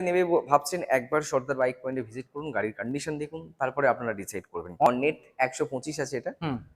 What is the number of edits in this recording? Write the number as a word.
one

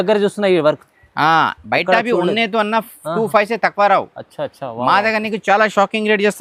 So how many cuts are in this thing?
zero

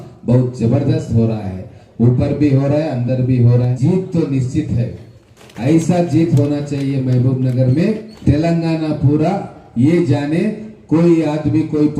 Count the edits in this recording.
three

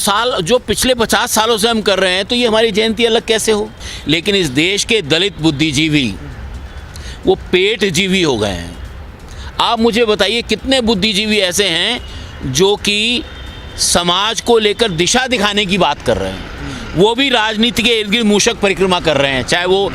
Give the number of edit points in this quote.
one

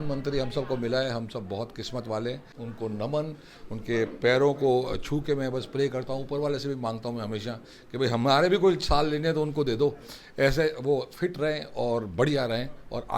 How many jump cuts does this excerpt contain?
one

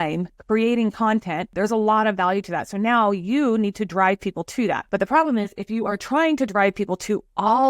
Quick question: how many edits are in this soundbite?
two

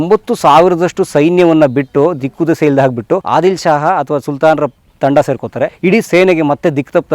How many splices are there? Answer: two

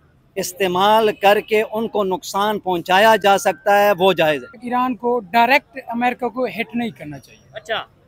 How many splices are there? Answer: one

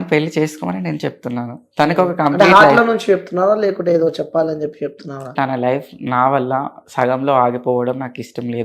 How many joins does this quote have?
one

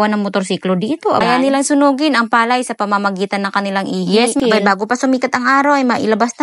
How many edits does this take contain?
two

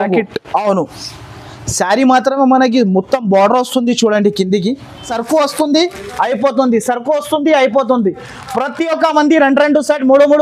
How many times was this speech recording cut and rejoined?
one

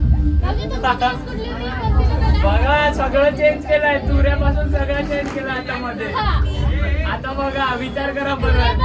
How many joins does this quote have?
zero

